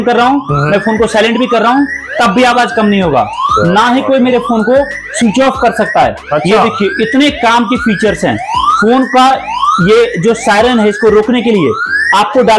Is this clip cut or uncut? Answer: uncut